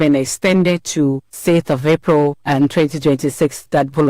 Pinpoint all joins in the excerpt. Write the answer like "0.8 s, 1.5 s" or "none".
1.3 s, 2.4 s